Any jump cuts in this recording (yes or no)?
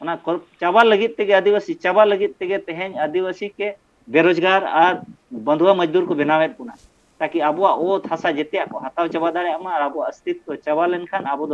no